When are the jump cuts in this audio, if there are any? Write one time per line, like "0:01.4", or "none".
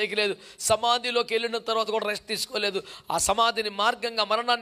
none

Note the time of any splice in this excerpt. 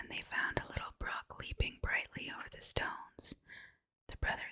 none

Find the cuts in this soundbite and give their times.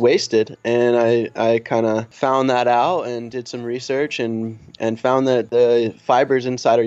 0:02.1
0:05.5

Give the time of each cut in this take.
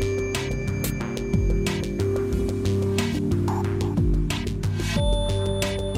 none

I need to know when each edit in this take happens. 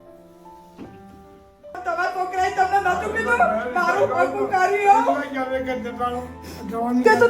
0:01.8

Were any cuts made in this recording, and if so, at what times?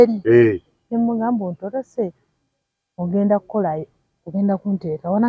none

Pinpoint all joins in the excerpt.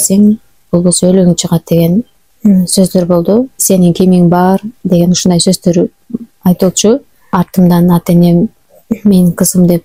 0:03.6
0:07.2

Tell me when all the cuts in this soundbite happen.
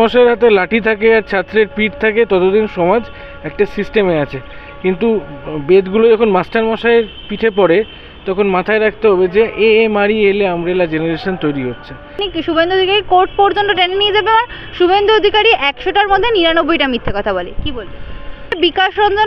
0:12.3
0:18.6

